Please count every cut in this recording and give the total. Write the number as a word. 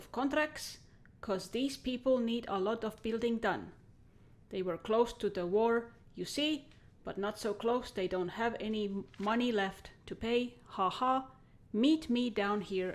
one